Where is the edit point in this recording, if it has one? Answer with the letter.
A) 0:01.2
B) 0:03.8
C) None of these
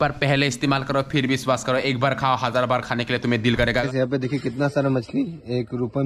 B